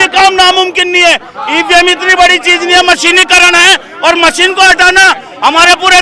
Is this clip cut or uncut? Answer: uncut